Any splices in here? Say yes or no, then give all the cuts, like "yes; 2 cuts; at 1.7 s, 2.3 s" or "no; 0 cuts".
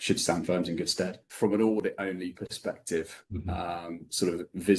yes; 1 cut; at 1.2 s